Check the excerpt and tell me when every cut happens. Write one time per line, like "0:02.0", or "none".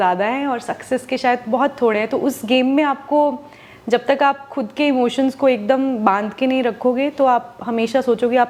none